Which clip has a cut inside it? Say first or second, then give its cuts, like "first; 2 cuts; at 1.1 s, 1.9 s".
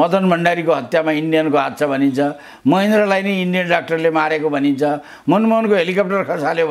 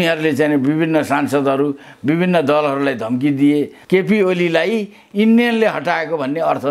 second; 1 cut; at 3.8 s